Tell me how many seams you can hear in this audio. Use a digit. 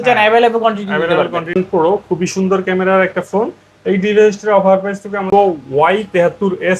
2